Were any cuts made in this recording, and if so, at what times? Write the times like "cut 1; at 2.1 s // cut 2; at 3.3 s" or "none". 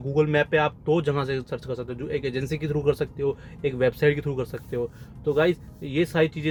none